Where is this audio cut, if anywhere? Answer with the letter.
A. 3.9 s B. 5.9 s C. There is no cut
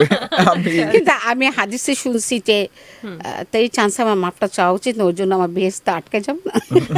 C